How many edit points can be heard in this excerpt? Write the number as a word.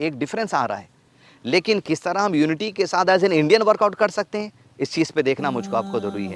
zero